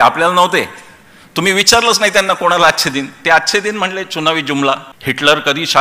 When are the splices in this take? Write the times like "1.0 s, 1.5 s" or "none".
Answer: 4.9 s